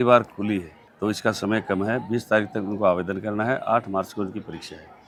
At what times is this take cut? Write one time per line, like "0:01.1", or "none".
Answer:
none